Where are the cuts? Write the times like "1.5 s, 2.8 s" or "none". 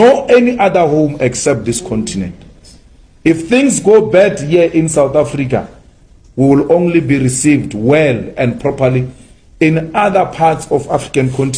none